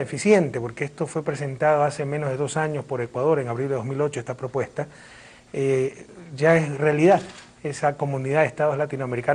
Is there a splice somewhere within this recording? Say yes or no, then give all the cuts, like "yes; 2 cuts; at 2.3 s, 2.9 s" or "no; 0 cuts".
no; 0 cuts